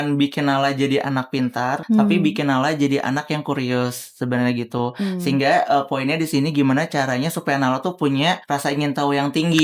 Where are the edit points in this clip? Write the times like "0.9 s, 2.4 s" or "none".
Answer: 1.8 s, 8.4 s

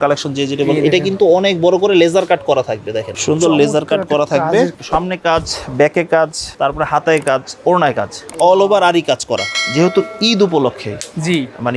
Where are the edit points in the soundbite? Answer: 3.1 s, 4.8 s, 6.4 s, 9.6 s

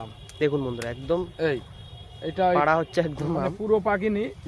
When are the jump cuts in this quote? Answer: none

